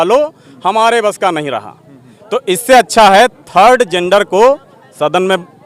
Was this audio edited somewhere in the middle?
no; 0 cuts

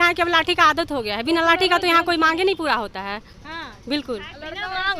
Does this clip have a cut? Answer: no; 0 cuts

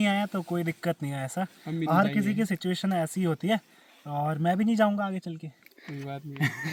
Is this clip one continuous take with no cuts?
yes; 0 cuts

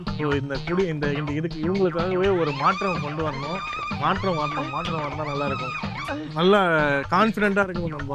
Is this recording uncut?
yes; 0 cuts

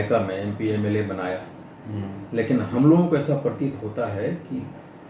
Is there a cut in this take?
no; 0 cuts

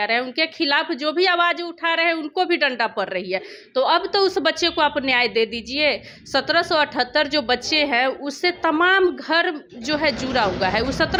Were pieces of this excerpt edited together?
no; 0 cuts

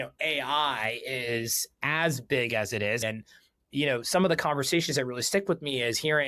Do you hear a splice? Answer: yes; 1 cut; at 3.0 s

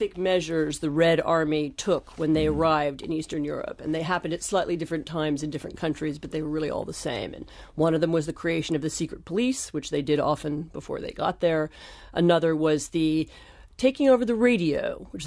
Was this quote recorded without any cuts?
no; 1 cut; at 7.8 s

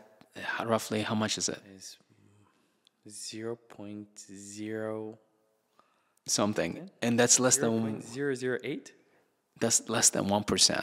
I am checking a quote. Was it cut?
no; 0 cuts

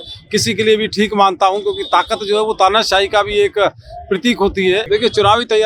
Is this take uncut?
yes; 0 cuts

